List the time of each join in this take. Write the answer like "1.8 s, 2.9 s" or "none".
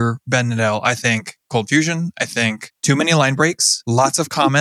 2.7 s, 3.7 s